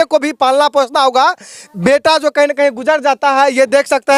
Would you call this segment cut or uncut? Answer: uncut